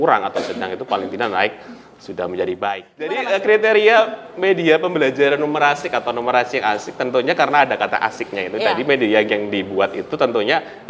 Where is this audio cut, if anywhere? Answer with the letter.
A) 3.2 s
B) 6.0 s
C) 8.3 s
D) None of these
A